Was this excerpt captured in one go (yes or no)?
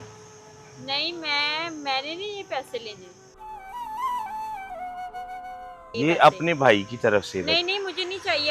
no